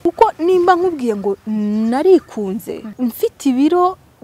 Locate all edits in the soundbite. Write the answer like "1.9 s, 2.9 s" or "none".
2.9 s

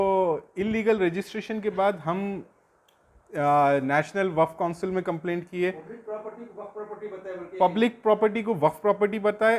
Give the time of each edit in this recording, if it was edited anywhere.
none

